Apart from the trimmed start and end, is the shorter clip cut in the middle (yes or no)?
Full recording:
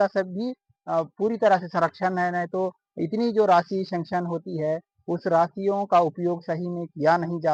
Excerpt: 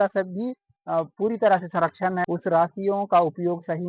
yes